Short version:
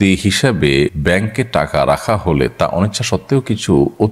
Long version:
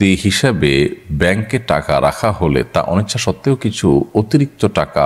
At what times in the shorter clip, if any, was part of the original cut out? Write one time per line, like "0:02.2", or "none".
0:01.0